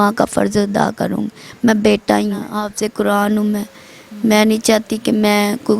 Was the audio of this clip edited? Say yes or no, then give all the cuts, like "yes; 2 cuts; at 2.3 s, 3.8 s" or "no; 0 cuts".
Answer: yes; 1 cut; at 2.6 s